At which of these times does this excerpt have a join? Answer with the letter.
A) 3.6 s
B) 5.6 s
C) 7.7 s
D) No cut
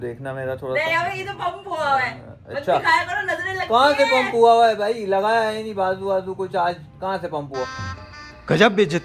D